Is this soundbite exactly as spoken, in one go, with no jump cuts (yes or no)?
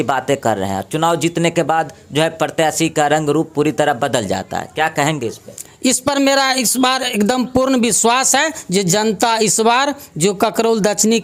yes